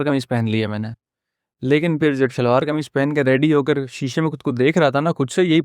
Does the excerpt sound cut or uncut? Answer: cut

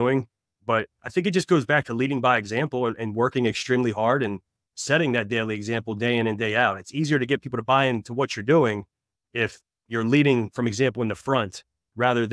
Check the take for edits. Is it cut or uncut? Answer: uncut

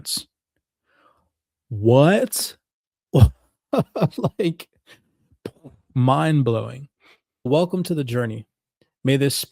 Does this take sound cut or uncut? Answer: cut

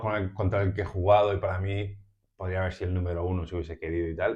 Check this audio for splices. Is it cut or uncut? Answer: uncut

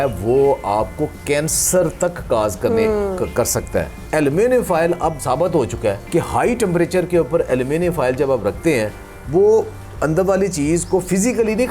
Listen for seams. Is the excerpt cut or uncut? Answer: cut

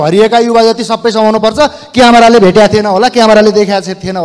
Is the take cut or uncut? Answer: uncut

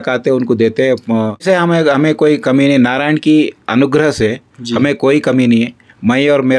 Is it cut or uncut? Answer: cut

